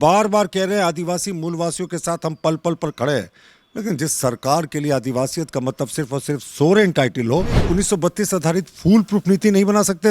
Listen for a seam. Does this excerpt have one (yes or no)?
yes